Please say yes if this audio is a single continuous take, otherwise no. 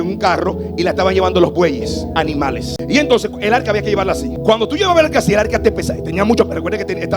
no